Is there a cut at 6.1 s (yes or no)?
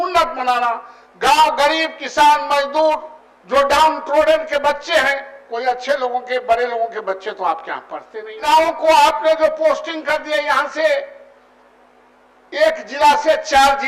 no